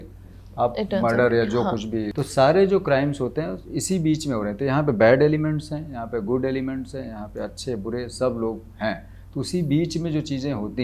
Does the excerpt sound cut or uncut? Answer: cut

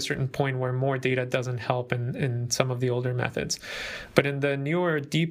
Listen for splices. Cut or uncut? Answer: uncut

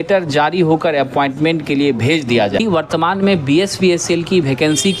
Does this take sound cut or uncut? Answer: cut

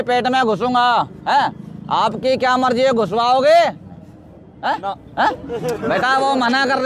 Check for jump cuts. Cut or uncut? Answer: uncut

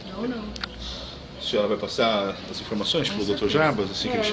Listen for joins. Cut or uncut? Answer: uncut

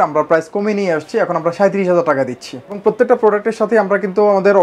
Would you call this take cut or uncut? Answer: cut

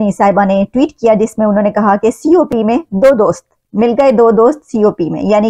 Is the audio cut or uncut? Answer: uncut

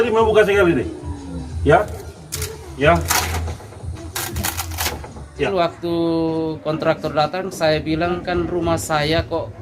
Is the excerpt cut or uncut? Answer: cut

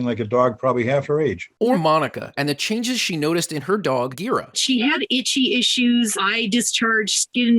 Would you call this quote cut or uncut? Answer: uncut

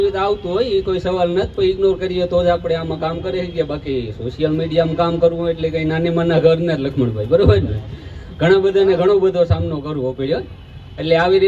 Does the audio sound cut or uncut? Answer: uncut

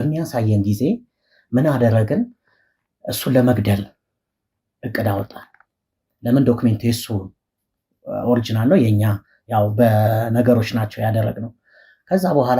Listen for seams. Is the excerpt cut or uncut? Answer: uncut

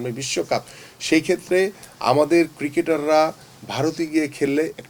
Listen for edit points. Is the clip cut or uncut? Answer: uncut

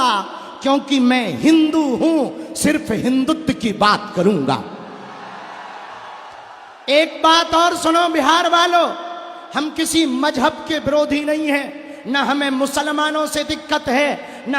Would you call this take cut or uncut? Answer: uncut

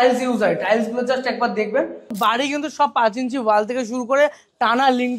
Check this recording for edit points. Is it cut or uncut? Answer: cut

